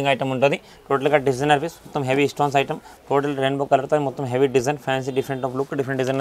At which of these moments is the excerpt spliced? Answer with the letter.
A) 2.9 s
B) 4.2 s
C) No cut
A